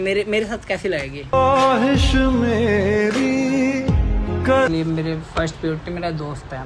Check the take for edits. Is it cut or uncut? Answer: cut